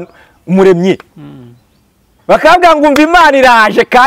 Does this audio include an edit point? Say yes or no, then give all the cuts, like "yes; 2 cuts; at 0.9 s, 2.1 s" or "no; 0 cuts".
no; 0 cuts